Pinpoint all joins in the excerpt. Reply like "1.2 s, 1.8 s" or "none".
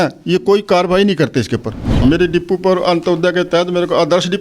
1.9 s